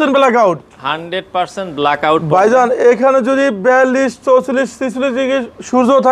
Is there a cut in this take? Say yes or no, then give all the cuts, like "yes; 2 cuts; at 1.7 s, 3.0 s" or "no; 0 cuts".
no; 0 cuts